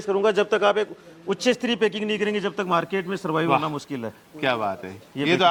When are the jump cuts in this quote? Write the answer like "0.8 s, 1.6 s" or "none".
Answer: none